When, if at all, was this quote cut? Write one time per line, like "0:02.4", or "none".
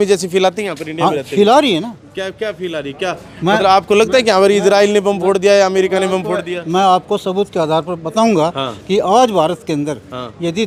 none